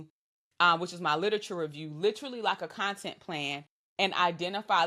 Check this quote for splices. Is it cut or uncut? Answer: uncut